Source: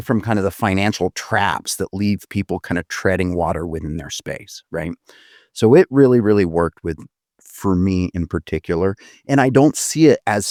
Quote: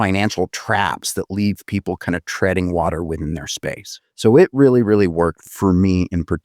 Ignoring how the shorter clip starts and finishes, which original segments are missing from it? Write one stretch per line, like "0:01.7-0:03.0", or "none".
0:04.5-0:05.3
0:06.8-0:07.5